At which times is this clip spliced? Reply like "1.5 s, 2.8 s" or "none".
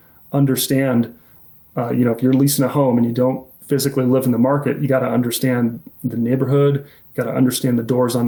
none